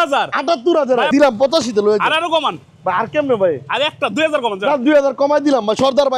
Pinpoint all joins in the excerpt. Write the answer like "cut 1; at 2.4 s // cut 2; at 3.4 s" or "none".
cut 1; at 1.1 s

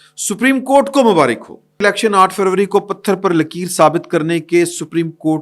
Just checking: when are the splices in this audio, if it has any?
cut 1; at 1.8 s

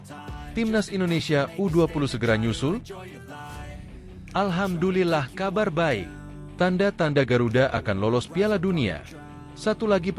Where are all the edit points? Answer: cut 1; at 2.9 s // cut 2; at 4.3 s

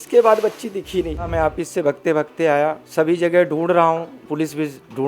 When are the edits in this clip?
cut 1; at 1.3 s // cut 2; at 2.8 s // cut 3; at 4.2 s

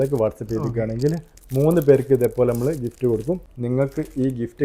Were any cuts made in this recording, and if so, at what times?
cut 1; at 3.5 s

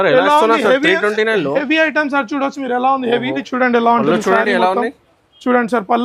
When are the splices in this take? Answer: cut 1; at 3.4 s

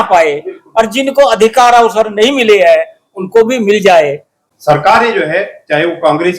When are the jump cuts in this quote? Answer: cut 1; at 4.3 s

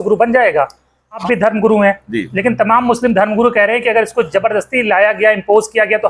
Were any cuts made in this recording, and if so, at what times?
cut 1; at 1.2 s

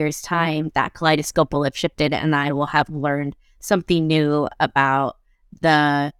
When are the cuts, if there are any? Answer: none

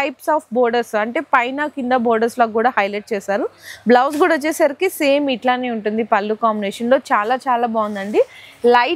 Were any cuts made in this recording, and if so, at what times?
none

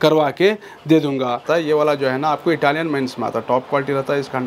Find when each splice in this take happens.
cut 1; at 1.4 s

